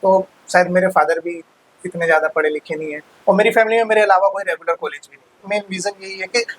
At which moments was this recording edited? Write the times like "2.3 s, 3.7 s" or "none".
5.4 s